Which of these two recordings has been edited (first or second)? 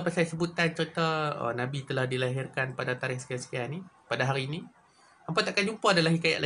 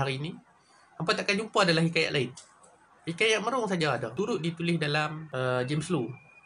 second